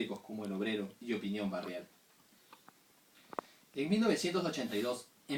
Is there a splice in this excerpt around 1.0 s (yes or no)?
yes